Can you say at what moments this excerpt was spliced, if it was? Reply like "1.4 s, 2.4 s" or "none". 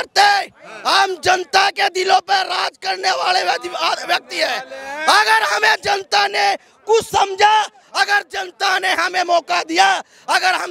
none